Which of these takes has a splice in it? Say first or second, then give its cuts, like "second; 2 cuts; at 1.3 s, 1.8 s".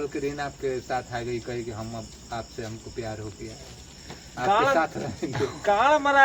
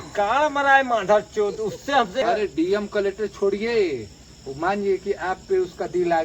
second; 1 cut; at 2.2 s